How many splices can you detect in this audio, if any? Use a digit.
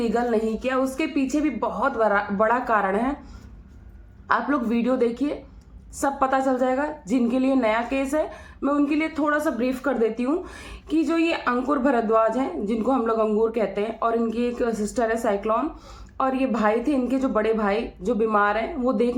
0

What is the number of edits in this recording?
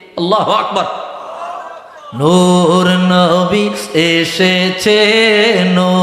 0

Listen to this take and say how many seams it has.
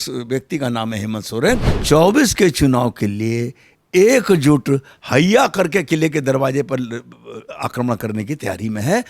1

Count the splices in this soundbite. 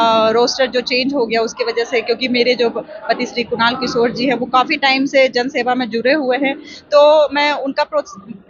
0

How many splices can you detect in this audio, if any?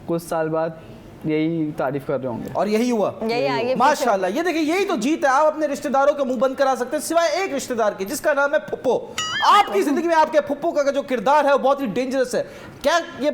0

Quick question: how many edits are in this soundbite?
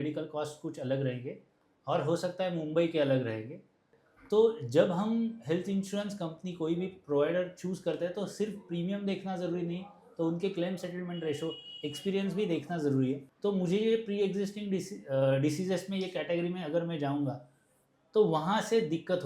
2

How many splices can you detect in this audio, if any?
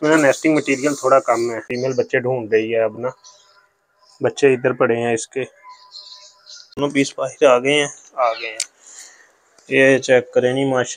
2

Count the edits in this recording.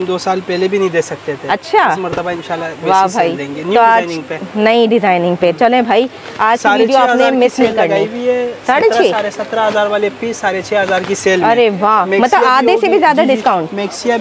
0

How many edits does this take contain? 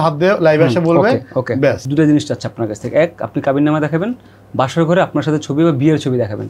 1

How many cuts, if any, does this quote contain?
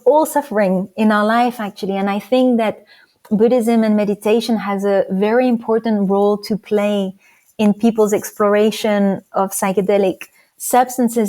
0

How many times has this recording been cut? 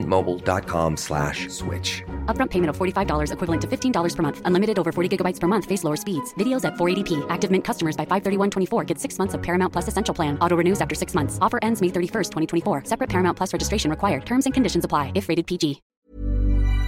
1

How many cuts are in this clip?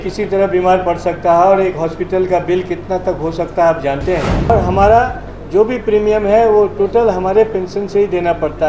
1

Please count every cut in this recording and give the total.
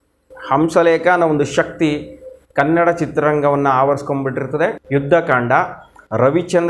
1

